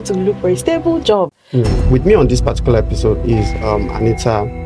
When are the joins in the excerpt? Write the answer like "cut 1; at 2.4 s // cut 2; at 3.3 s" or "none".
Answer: cut 1; at 1.4 s